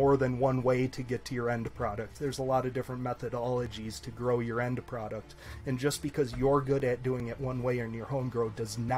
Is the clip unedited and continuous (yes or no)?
yes